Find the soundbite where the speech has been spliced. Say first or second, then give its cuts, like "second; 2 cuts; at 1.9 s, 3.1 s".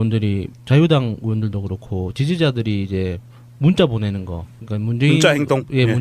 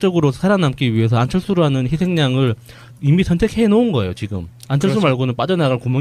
first; 1 cut; at 3.2 s